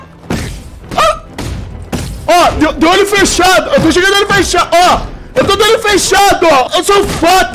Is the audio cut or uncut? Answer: cut